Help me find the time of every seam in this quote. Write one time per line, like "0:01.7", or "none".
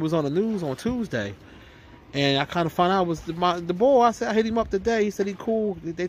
none